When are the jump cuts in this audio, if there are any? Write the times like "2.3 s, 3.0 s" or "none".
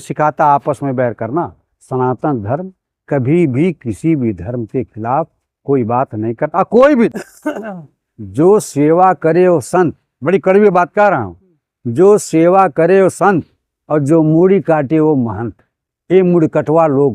7.1 s